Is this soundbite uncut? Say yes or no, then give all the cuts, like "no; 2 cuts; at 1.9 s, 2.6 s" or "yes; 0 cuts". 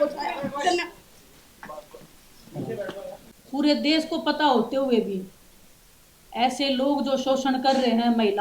no; 1 cut; at 3.3 s